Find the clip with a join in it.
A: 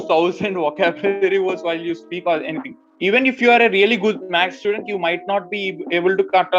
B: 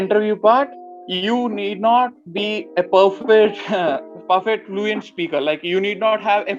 A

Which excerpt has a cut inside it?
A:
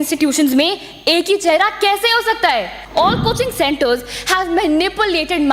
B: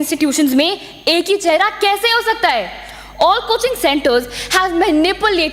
A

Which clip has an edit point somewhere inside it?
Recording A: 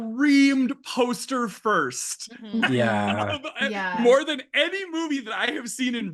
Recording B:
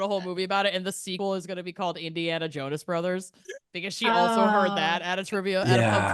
B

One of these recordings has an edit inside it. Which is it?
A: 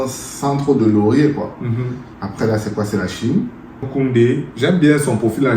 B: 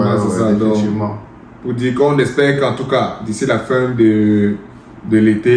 A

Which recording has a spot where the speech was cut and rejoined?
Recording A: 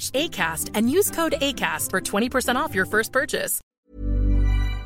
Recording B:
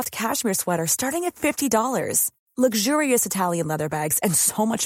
A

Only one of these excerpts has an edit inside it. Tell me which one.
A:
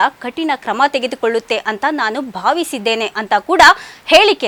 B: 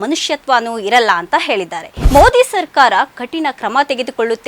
B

